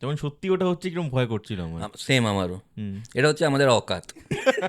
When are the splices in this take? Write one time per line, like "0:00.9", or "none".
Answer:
none